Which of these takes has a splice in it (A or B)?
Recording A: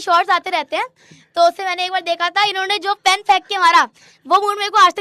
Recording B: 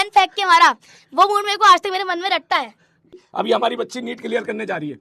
B